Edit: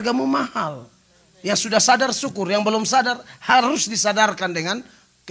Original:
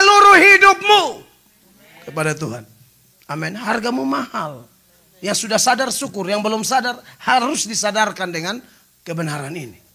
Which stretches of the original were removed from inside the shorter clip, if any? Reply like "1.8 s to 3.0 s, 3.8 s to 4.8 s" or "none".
none